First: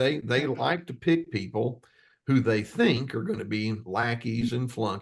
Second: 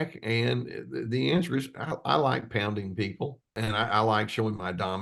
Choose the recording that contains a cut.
second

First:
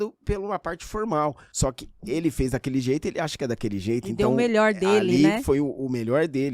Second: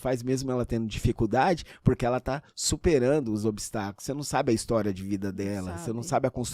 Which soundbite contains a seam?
first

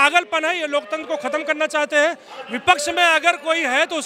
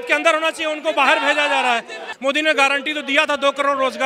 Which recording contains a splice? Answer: second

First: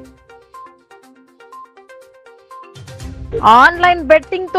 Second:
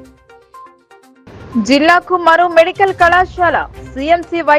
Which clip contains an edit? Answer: first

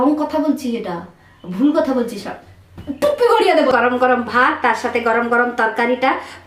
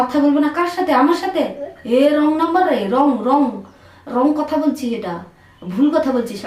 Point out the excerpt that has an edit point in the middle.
first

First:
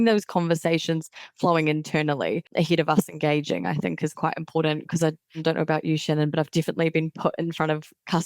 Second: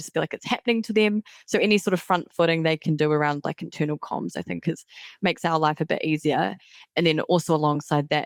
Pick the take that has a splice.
first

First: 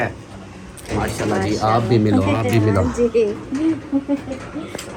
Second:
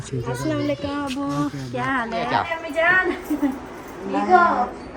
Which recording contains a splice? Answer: second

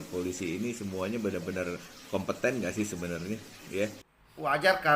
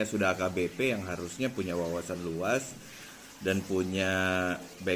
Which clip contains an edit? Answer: first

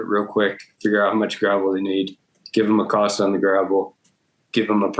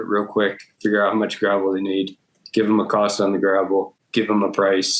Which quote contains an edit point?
second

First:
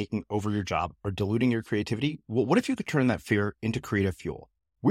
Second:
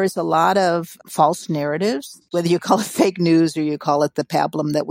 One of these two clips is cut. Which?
second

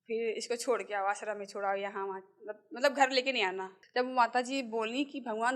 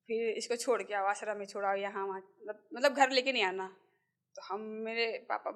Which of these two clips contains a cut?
first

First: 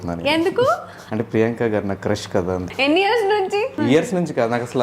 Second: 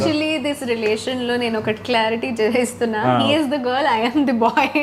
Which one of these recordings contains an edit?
first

